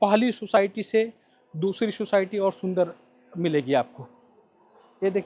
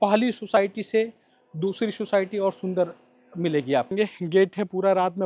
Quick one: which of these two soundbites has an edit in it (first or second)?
second